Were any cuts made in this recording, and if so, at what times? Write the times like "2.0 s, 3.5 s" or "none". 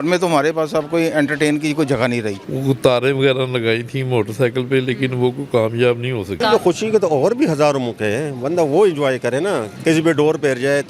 2.4 s, 6.4 s, 9.7 s